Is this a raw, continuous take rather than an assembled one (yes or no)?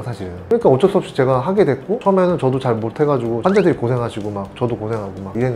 yes